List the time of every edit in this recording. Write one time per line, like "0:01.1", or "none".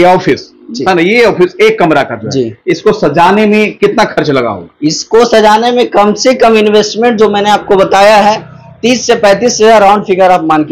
none

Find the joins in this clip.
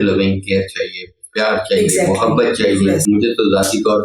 0:03.0

